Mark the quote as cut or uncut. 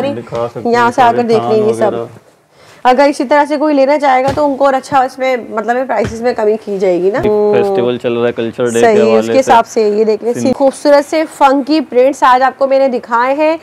cut